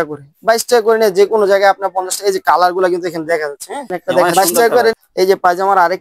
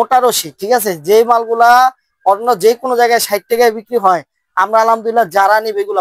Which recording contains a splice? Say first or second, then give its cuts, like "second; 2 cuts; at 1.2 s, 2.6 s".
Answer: first; 1 cut; at 4.9 s